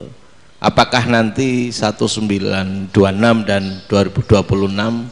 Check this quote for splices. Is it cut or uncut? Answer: uncut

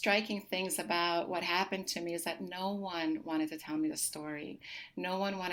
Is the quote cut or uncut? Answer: uncut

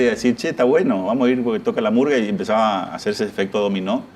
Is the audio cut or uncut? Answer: uncut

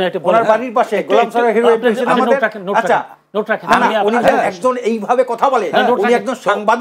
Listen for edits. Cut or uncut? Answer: uncut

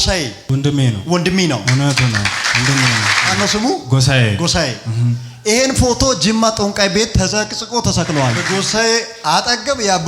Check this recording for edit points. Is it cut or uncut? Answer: cut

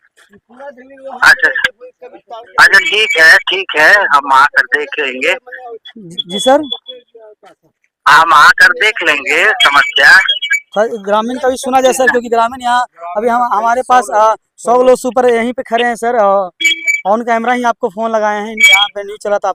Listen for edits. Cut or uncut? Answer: uncut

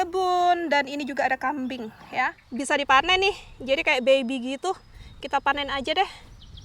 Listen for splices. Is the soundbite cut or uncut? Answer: cut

